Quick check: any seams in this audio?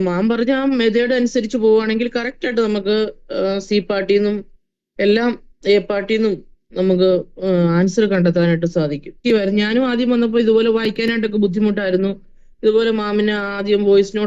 no; 0 cuts

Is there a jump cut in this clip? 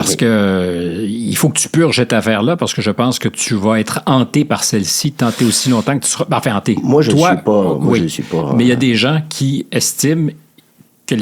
no; 0 cuts

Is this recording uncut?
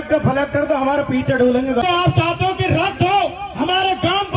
no; 1 cut; at 1.8 s

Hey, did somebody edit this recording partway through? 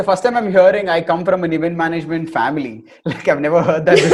no; 0 cuts

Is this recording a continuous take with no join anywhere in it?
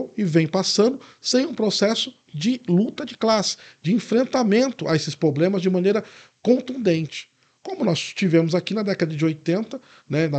yes; 0 cuts

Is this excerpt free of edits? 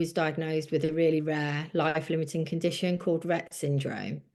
yes; 0 cuts

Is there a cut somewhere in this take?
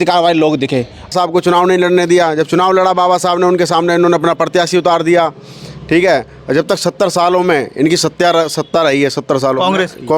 yes; 1 cut; at 1.1 s

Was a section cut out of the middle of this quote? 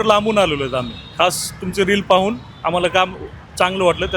no; 0 cuts

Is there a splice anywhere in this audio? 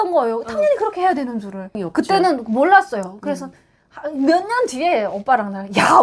yes; 1 cut; at 1.7 s

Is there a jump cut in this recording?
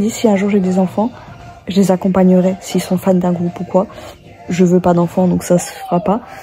no; 0 cuts

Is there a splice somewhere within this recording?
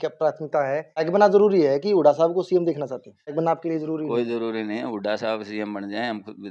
yes; 2 cuts; at 1.1 s, 3.3 s

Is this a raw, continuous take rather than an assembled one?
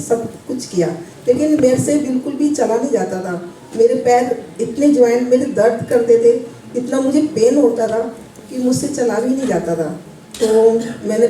yes; 0 cuts

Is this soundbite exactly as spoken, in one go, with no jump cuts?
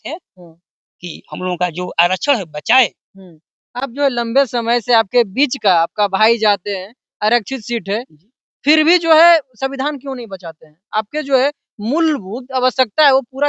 yes; 0 cuts

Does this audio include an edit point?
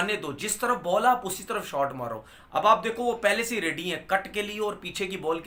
no; 0 cuts

